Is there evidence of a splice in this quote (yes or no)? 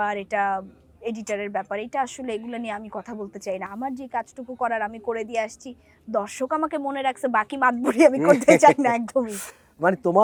no